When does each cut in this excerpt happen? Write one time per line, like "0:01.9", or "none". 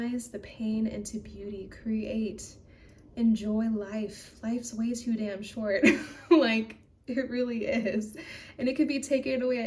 none